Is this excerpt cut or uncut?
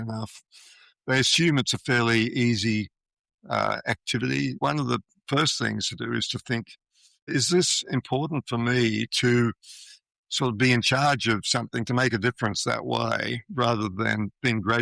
cut